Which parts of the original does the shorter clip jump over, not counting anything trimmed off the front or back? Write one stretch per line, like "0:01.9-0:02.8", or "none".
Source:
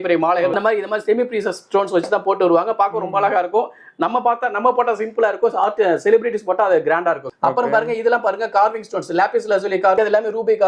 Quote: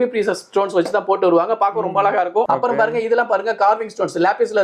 0:03.6-0:07.4